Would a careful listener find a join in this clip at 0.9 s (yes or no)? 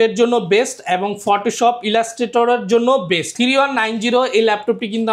no